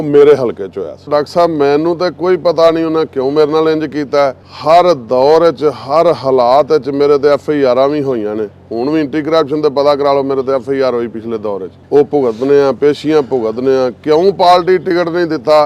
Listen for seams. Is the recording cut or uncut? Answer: cut